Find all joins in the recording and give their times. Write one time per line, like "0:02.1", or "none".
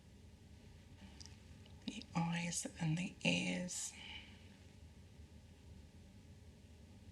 0:01.0